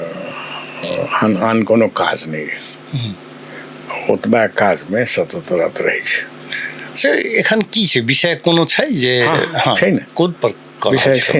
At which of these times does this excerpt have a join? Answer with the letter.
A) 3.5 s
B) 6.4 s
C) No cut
C